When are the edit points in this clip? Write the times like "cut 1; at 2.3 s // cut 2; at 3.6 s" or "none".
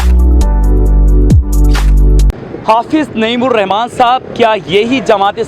cut 1; at 2.3 s